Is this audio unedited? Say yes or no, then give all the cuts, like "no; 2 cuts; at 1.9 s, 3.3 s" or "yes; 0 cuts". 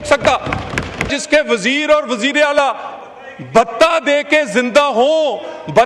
no; 1 cut; at 1.1 s